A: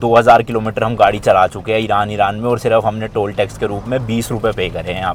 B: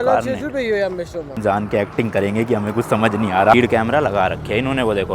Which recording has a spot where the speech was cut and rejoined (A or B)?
B